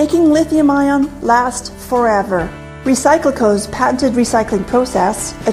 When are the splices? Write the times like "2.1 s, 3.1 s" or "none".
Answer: 1.6 s